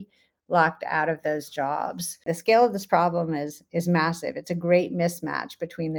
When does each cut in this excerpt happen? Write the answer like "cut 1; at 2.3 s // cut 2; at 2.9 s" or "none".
cut 1; at 2.3 s